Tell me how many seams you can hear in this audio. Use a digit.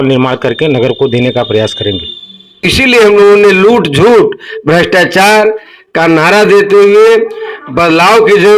1